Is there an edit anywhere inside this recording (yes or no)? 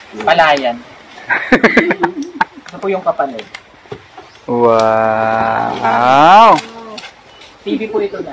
no